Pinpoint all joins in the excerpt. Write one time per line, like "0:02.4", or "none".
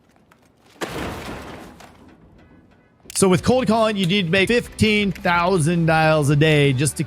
0:03.1